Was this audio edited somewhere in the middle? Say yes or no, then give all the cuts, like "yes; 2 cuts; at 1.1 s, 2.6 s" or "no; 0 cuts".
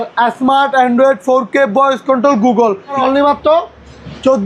yes; 1 cut; at 3.0 s